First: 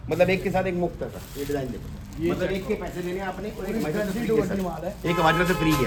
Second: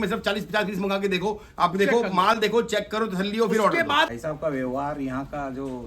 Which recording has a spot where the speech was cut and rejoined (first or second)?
second